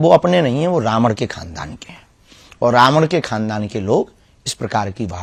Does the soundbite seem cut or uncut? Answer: uncut